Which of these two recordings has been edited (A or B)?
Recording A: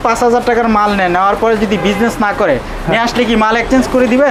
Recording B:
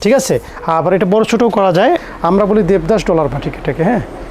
B